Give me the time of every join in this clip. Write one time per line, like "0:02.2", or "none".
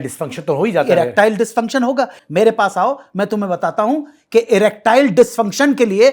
0:02.2